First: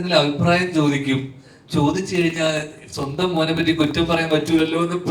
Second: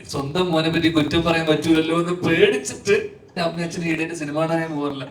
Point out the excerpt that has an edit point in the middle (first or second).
second